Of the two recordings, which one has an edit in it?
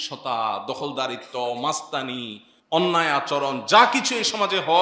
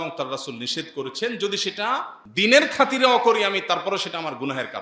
second; 1 cut; at 2.2 s

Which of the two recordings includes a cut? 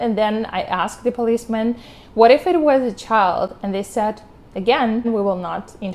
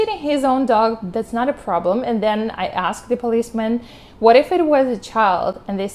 first; 1 cut; at 5.1 s

